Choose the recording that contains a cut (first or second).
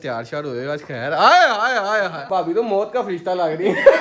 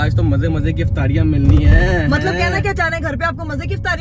first